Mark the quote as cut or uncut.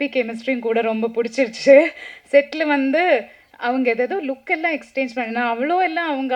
uncut